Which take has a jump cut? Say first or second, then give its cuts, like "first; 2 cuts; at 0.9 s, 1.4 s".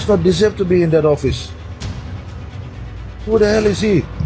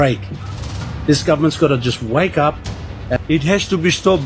second; 1 cut; at 3.2 s